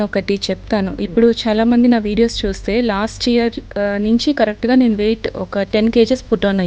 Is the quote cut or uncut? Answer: uncut